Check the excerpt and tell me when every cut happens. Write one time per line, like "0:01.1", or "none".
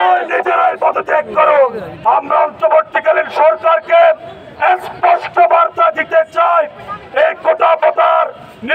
0:02.0